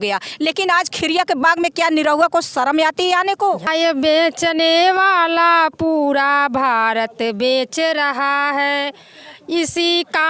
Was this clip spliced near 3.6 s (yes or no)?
yes